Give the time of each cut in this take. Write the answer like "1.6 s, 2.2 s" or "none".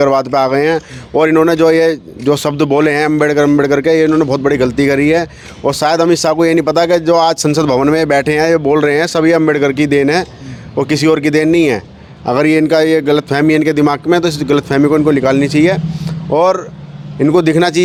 none